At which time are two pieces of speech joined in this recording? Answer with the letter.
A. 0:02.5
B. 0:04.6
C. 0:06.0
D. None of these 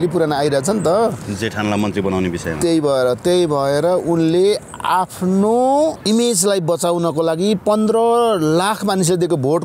C